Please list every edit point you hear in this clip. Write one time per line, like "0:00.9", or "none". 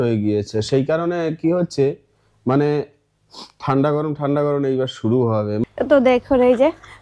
0:05.6